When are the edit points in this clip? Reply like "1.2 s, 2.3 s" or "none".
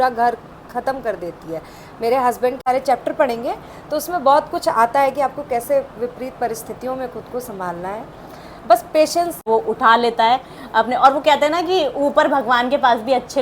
2.6 s, 9.4 s